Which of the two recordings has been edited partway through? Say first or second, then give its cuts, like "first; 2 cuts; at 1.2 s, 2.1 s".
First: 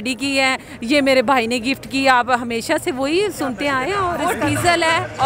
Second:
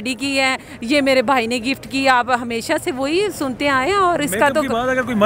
first; 1 cut; at 4.2 s